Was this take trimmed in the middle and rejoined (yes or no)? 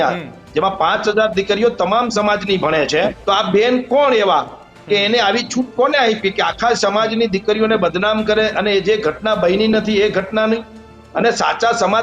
yes